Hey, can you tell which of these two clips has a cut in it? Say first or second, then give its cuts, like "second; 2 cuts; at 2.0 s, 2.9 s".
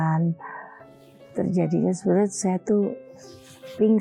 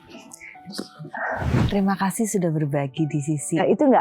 second; 1 cut; at 1.6 s